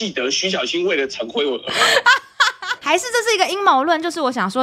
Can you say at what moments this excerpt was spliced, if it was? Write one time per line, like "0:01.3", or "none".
0:02.7